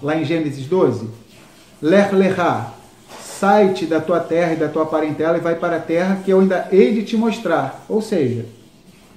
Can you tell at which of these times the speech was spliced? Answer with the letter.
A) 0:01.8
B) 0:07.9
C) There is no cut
C